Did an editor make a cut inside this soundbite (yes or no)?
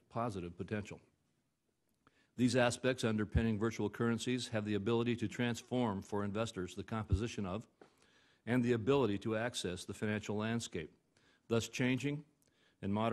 no